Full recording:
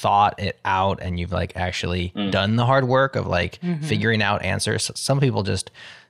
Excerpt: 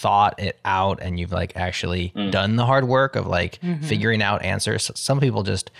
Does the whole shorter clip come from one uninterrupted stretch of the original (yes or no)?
yes